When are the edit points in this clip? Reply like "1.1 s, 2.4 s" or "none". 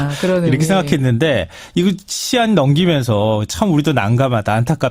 1.3 s

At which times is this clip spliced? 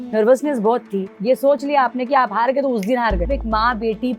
1.1 s, 3.3 s

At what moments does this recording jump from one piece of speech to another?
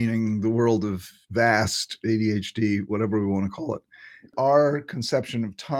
4.3 s

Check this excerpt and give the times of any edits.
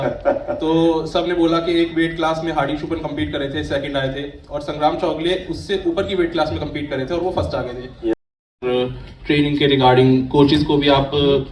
8.1 s

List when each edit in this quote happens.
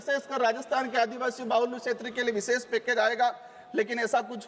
none

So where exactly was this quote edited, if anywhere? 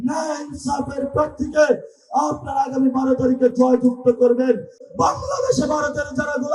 4.8 s

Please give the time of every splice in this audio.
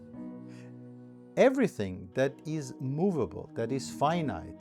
1.3 s

